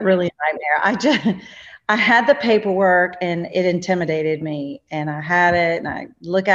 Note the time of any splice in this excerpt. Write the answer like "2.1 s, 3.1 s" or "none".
none